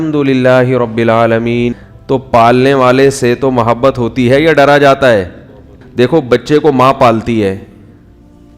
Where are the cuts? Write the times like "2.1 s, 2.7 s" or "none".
1.8 s, 5.8 s